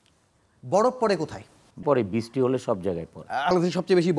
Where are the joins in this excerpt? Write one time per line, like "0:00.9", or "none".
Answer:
0:01.8
0:03.5